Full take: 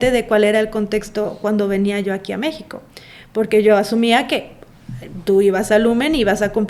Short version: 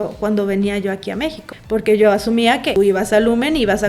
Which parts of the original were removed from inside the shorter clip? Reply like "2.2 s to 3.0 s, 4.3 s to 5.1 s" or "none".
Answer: 2.7 s to 3.1 s, 4.4 s to 5.3 s